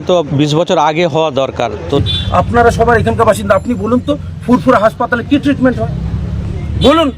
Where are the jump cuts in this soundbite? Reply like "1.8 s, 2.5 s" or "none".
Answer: 2.0 s